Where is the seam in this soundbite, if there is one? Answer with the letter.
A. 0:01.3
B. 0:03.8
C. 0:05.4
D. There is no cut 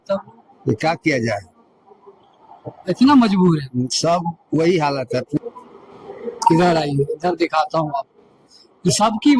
C